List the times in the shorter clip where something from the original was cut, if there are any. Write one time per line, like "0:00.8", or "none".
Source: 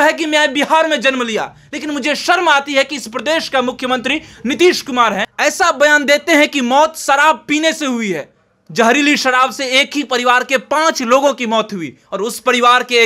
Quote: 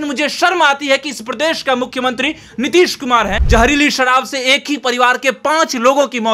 0:03.4